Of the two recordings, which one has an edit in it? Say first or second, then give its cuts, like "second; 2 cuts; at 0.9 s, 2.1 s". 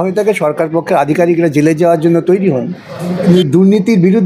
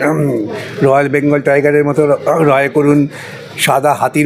first; 1 cut; at 3.2 s